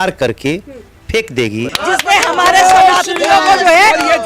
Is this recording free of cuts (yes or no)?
no